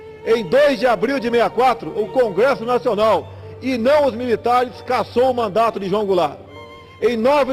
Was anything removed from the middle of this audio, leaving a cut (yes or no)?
no